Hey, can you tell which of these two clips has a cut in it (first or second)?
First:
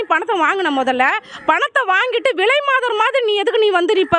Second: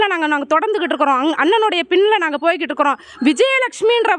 second